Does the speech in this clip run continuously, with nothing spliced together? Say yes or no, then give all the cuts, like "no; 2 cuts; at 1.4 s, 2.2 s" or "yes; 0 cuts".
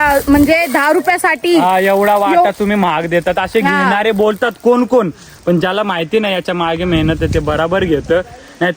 yes; 0 cuts